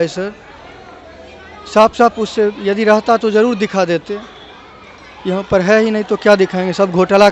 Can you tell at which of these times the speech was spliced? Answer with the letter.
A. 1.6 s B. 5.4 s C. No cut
C